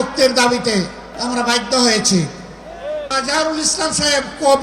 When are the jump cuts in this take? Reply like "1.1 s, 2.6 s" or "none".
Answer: 1.1 s, 3.1 s